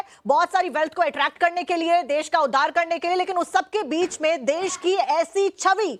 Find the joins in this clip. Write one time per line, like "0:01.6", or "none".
none